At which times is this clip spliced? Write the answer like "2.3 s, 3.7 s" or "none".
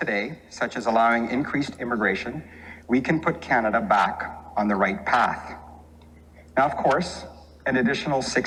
none